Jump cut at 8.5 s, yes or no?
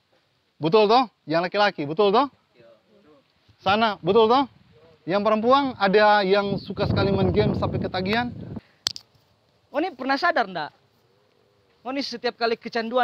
yes